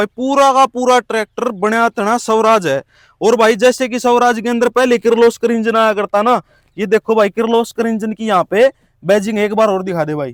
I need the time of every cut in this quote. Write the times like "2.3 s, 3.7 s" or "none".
none